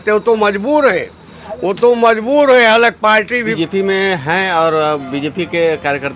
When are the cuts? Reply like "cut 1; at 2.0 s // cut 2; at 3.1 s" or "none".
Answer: cut 1; at 3.4 s